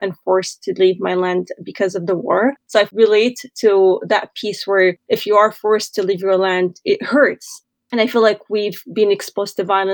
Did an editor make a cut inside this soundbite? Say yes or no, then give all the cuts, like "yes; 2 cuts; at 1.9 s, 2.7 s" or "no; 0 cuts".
no; 0 cuts